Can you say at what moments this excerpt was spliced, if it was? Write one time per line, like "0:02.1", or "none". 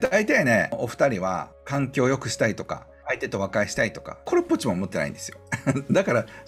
0:00.7
0:01.6
0:03.0
0:04.1